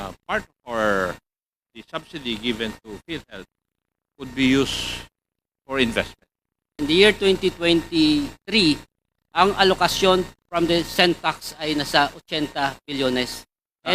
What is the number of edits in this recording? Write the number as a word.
one